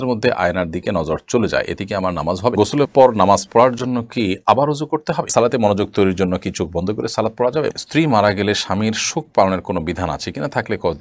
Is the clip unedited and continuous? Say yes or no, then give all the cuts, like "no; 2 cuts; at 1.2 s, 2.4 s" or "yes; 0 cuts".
no; 3 cuts; at 2.5 s, 5.3 s, 7.7 s